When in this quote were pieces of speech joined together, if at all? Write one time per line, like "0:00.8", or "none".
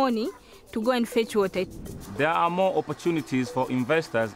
0:01.7